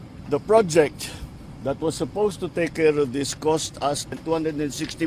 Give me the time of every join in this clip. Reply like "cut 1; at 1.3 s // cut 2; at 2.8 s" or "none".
cut 1; at 4.1 s